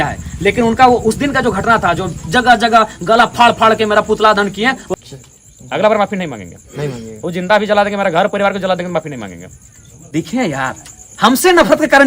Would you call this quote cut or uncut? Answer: cut